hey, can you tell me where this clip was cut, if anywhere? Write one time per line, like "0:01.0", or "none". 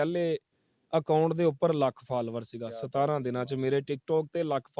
none